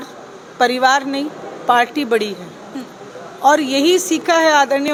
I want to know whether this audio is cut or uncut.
uncut